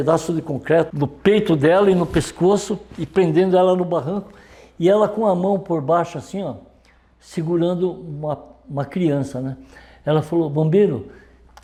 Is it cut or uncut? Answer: uncut